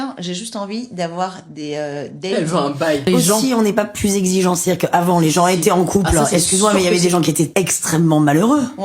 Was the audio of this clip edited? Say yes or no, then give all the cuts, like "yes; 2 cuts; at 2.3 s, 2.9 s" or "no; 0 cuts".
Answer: yes; 1 cut; at 3.9 s